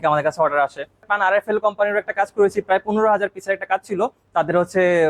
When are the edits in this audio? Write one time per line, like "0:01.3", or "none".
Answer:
0:01.1